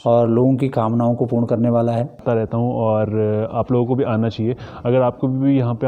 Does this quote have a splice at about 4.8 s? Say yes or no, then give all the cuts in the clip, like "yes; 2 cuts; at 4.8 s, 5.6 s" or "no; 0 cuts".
no; 1 cut; at 2.2 s